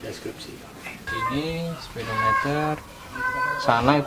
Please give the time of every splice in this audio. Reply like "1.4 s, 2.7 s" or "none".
1.1 s